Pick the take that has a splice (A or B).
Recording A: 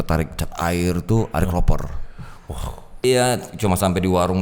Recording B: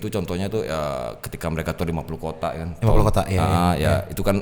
A